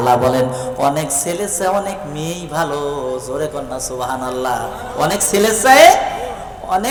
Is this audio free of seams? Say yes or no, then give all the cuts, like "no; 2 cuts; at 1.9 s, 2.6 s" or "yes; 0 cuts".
yes; 0 cuts